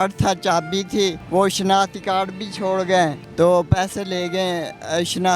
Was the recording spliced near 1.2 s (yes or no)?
yes